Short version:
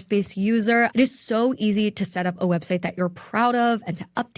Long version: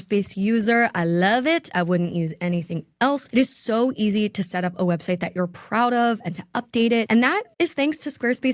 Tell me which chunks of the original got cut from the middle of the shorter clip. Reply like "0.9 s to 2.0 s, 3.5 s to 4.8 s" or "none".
0.9 s to 3.3 s

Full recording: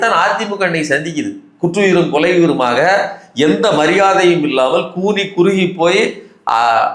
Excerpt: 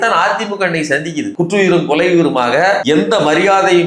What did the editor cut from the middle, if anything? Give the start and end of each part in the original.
1.3 s to 1.5 s, 3.0 s to 3.3 s

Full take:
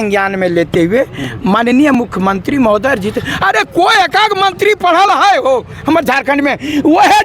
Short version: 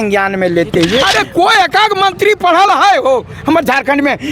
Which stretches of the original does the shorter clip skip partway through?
1.1 s to 3.5 s

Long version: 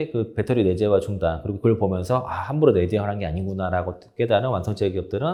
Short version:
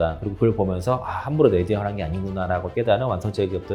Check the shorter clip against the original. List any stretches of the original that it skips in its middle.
3.9 s to 4.1 s

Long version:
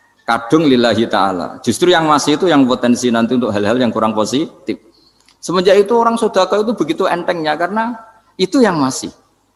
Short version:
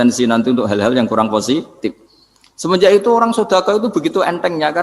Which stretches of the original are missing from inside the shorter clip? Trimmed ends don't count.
none

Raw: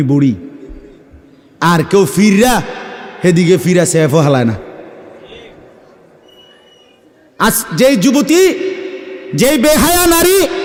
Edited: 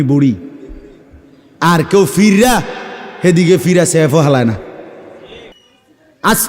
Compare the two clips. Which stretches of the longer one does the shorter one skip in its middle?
5.5 s to 6.7 s

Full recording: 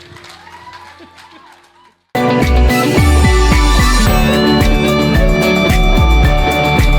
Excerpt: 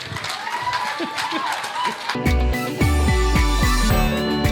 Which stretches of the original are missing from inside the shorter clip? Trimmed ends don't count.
2.1 s to 2.3 s

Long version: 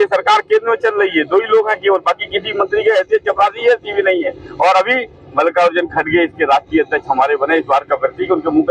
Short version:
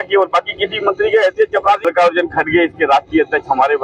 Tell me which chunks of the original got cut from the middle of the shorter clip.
3.6 s to 5.4 s

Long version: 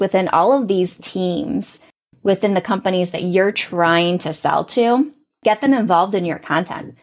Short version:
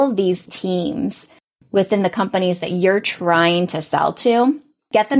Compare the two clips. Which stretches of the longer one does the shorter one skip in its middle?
none

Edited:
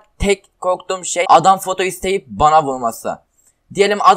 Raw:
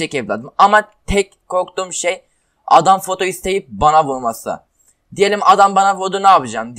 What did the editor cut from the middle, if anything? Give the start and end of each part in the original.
2.1 s to 2.7 s

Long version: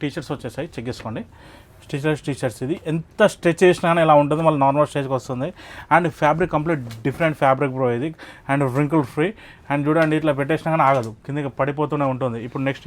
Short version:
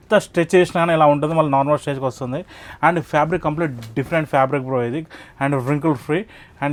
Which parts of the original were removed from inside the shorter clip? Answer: none

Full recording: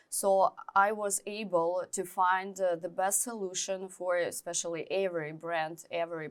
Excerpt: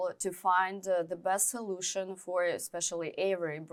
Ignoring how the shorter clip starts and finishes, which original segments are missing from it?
none

